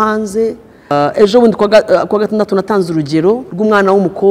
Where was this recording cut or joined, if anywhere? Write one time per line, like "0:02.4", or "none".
0:00.9
0:03.5